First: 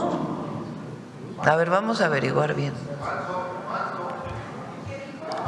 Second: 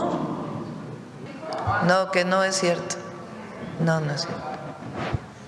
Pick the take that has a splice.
second; 1 cut; at 1.2 s

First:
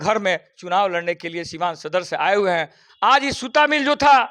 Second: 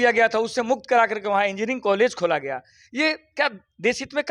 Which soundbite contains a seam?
first; 1 cut; at 2.8 s

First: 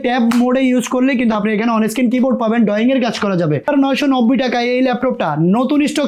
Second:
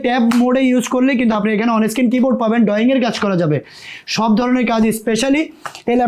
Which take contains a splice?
first; 1 cut; at 3.7 s

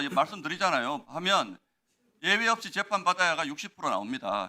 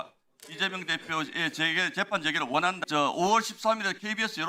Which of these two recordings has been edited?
second; 1 cut; at 2.8 s

